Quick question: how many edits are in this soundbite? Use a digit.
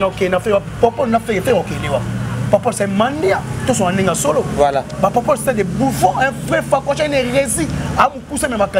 0